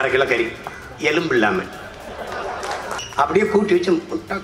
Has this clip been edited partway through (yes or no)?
yes